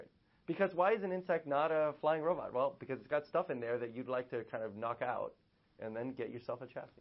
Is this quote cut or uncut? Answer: uncut